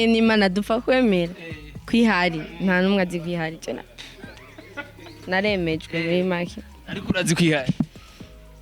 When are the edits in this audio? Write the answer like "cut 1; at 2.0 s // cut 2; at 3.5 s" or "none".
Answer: none

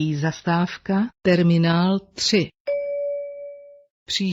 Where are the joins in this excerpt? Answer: cut 1; at 1.1 s // cut 2; at 2.6 s

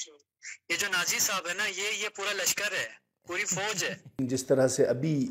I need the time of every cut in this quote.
cut 1; at 4.1 s

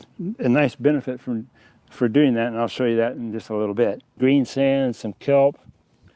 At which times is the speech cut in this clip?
cut 1; at 4.1 s

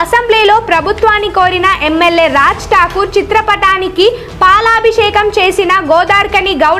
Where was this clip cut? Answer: none

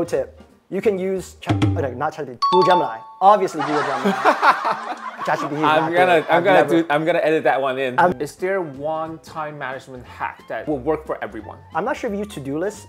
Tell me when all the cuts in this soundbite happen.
cut 1; at 8.1 s // cut 2; at 11.5 s

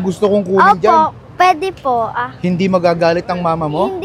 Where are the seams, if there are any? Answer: none

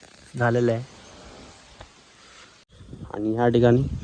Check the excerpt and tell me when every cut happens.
cut 1; at 2.6 s

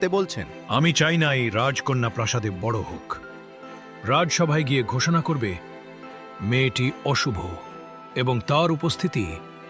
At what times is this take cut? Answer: none

